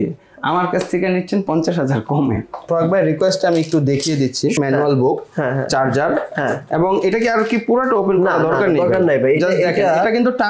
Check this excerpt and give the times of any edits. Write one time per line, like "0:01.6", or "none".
0:02.7
0:04.6